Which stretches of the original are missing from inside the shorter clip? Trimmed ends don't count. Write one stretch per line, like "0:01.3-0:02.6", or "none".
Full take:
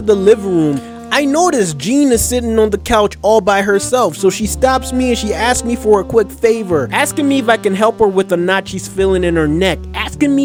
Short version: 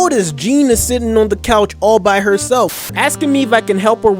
0:04.2-0:06.8